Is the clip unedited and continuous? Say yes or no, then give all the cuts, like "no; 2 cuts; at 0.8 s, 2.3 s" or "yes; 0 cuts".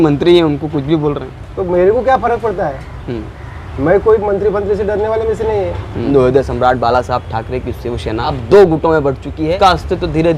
no; 3 cuts; at 6.1 s, 8.4 s, 9.6 s